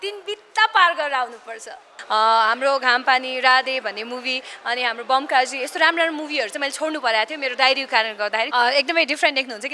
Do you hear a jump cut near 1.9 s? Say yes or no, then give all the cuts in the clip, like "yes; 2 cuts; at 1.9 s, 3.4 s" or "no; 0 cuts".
yes; 2 cuts; at 1.9 s, 8.5 s